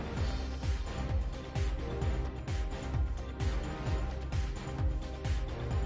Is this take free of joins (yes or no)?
yes